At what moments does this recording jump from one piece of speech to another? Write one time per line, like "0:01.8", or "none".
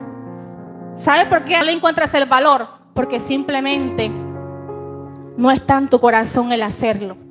0:01.6